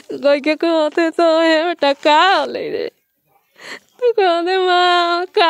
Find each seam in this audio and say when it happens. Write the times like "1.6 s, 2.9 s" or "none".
none